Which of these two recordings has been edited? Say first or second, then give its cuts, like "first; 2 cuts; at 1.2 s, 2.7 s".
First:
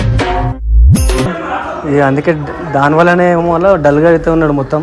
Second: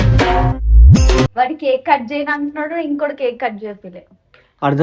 second; 1 cut; at 1.2 s